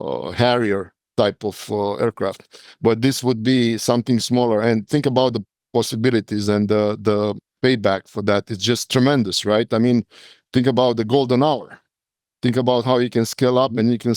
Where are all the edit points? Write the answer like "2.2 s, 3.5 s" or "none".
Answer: 5.5 s, 8.8 s